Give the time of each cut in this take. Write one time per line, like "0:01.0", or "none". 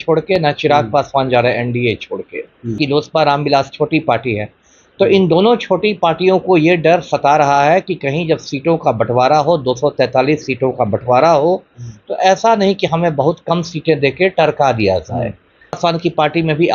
0:02.7
0:15.8

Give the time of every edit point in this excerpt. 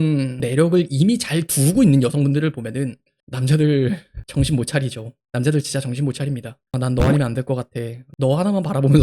0:08.0

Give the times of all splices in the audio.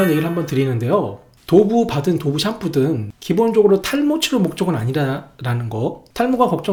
none

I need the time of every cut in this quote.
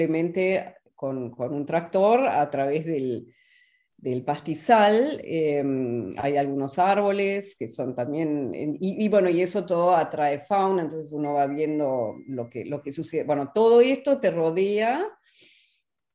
none

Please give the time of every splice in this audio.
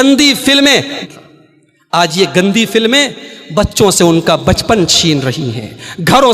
0:00.9

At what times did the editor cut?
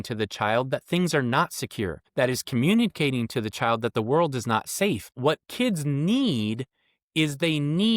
0:02.0
0:05.1

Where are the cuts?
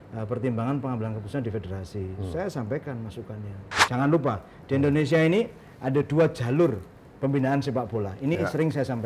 0:03.7

